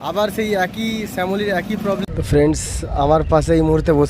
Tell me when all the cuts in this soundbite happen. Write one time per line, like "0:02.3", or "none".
0:02.0